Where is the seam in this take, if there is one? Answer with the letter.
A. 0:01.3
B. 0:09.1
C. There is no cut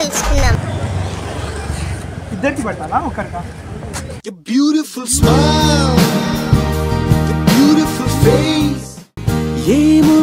B